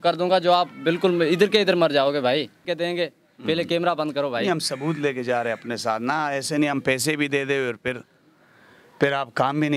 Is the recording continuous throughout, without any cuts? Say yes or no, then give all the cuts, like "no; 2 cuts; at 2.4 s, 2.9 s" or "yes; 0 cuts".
no; 1 cut; at 2.6 s